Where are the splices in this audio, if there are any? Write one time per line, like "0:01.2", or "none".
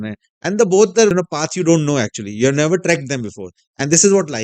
0:01.1